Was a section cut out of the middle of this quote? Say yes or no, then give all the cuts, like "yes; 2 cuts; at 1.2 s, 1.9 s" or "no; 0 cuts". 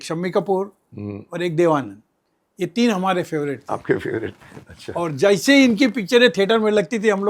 no; 0 cuts